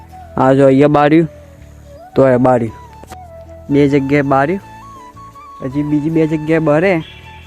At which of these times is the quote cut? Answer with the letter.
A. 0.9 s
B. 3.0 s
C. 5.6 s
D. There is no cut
D